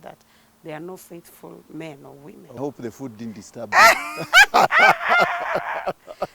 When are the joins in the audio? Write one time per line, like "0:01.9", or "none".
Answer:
0:02.6